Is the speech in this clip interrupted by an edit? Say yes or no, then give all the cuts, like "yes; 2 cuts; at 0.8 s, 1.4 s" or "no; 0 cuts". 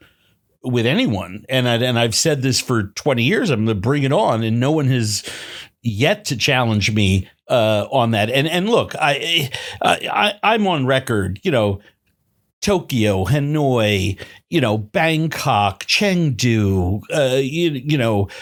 no; 0 cuts